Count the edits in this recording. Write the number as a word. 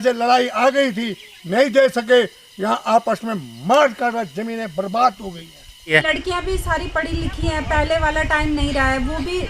one